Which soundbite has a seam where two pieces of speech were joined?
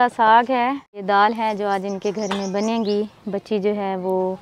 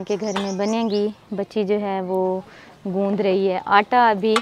first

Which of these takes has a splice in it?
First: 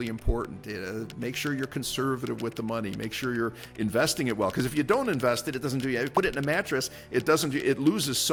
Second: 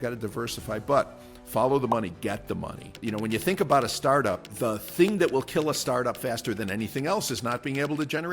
second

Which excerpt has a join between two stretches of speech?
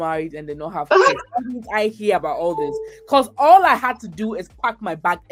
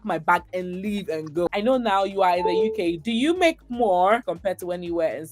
second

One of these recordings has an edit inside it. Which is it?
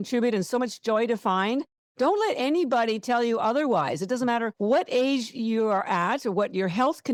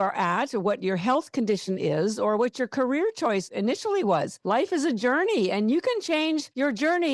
second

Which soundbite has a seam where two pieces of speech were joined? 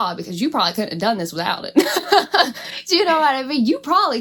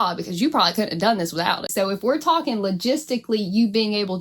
second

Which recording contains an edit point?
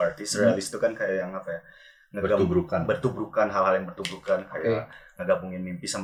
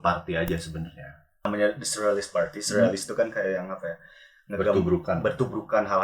second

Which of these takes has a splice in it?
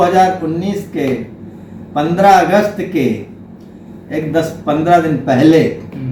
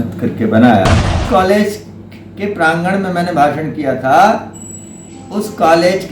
second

